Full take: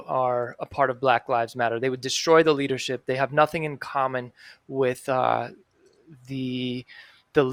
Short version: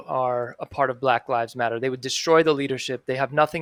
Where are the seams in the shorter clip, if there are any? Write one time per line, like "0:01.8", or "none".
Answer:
none